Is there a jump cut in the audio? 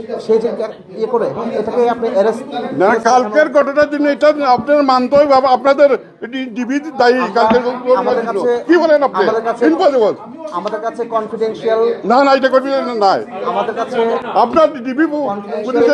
no; 0 cuts

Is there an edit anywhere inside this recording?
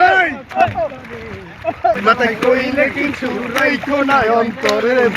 yes; 1 cut; at 2.0 s

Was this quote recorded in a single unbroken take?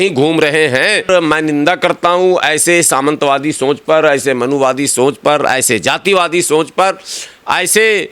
no; 1 cut; at 1.1 s

